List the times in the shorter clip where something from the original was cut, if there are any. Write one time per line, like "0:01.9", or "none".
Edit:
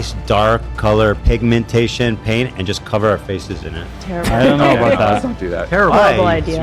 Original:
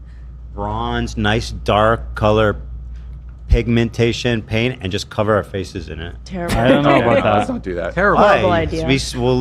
0:01.2